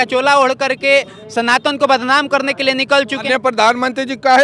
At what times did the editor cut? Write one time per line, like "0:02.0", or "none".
0:03.3